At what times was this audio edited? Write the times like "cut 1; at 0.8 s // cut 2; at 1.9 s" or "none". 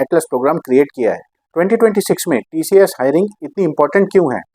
none